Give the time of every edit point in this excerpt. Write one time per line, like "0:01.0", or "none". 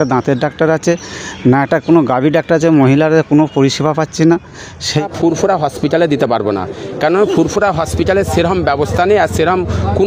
0:05.1